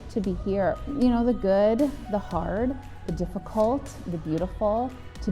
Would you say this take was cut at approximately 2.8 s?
no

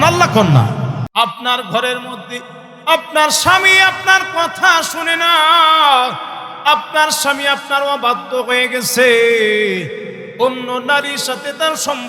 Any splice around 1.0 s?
yes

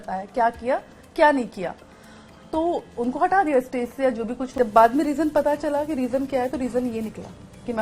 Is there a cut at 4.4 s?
yes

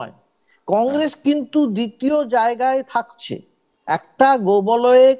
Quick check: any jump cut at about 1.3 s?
no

